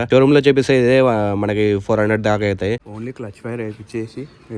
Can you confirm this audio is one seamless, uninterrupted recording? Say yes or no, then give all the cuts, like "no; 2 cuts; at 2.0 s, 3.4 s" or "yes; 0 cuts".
no; 1 cut; at 2.8 s